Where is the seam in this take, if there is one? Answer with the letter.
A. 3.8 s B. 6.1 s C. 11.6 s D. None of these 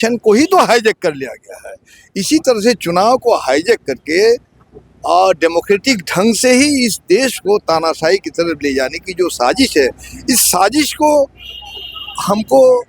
D